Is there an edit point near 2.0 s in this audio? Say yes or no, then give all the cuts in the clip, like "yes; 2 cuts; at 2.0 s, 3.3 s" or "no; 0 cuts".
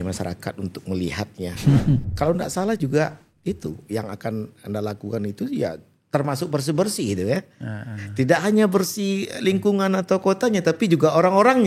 yes; 1 cut; at 2.0 s